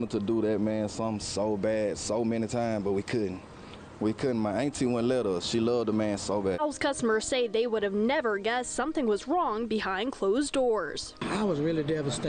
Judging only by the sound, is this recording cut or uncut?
uncut